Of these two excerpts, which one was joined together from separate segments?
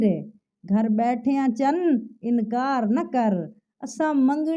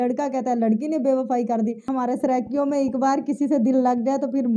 second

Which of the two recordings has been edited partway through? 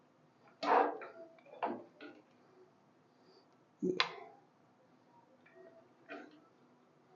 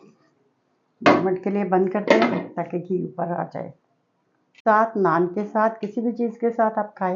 second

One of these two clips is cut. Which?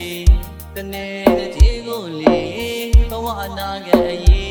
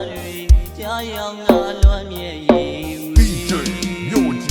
second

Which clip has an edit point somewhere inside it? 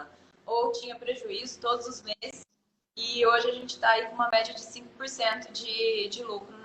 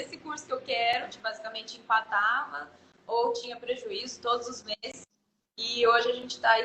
second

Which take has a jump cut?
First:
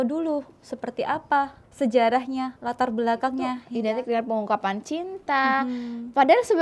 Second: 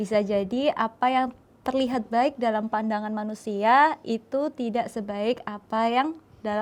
first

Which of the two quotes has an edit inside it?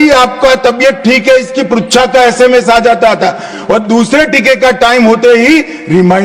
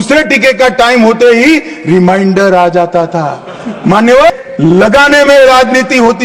second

